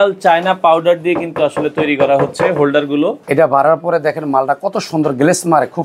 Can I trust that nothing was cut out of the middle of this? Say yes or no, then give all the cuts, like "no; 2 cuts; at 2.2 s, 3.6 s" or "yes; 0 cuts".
no; 1 cut; at 3.2 s